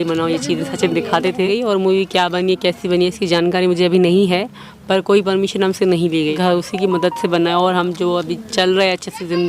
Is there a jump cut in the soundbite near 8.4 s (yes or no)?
no